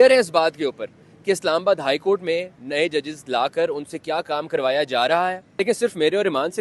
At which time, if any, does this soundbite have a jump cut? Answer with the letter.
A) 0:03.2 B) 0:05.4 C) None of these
B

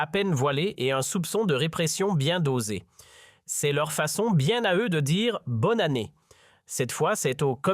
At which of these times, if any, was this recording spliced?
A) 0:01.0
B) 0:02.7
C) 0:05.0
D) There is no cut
C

